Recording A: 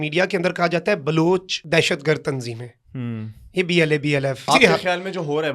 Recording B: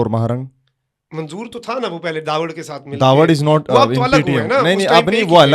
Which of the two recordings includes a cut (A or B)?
A